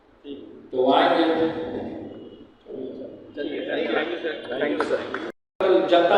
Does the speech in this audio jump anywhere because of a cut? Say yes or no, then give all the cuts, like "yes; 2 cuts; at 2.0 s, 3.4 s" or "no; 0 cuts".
no; 0 cuts